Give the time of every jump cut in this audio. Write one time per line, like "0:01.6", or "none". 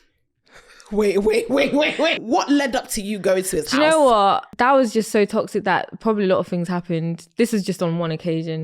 0:02.2
0:04.5